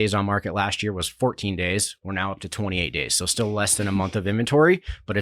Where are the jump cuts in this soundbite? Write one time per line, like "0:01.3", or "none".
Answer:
none